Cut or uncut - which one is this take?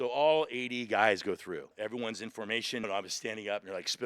cut